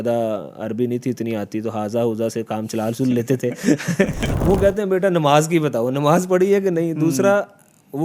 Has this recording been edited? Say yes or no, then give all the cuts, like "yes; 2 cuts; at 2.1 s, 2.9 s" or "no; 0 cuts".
yes; 1 cut; at 4.2 s